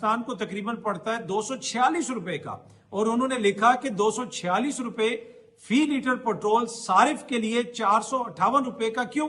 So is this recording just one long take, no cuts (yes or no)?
yes